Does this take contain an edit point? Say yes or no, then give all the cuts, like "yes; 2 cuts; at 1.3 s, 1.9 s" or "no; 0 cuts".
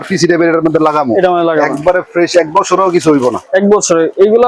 no; 0 cuts